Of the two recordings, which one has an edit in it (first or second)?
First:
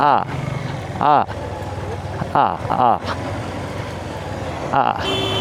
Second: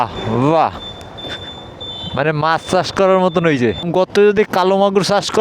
second